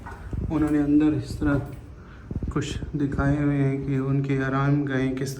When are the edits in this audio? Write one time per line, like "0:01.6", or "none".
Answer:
none